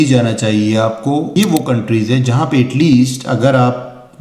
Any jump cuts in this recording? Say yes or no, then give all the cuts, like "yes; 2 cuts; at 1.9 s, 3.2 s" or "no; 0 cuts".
yes; 1 cut; at 1.3 s